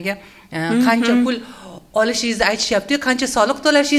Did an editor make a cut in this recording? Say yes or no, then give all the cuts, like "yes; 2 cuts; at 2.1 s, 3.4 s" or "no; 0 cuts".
no; 0 cuts